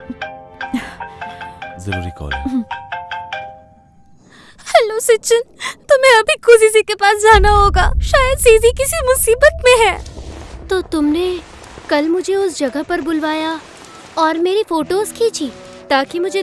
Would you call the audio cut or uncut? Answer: cut